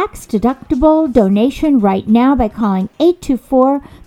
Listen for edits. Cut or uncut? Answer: uncut